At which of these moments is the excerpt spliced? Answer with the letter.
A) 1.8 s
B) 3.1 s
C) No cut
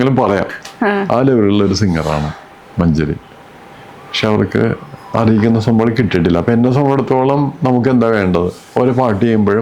C